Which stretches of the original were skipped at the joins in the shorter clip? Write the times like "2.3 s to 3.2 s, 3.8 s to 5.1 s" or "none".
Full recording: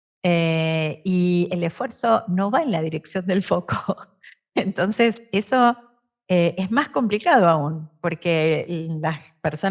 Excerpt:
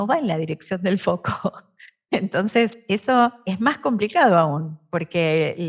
5.9 s to 6.6 s